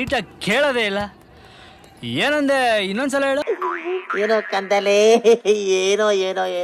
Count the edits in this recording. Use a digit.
1